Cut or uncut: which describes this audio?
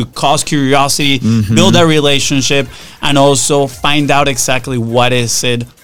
uncut